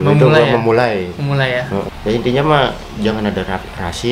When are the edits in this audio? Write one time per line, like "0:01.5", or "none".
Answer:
0:01.9